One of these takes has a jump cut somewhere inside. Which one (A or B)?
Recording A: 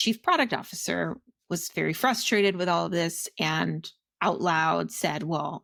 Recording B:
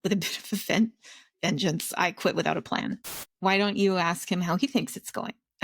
B